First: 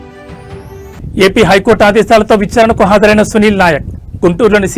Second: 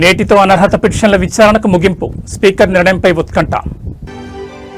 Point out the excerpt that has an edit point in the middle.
first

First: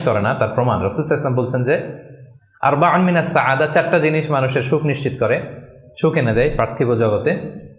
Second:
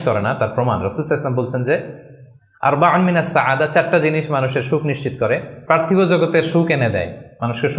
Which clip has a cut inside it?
second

